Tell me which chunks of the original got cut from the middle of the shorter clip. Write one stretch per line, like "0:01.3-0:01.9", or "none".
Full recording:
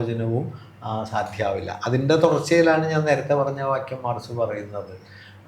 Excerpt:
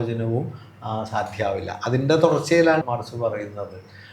0:02.8-0:04.0